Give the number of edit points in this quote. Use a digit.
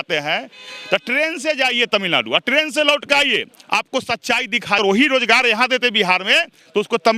1